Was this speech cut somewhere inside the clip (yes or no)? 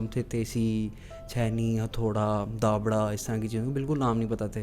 no